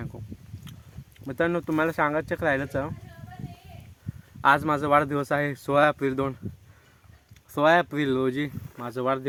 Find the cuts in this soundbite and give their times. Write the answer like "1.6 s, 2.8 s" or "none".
none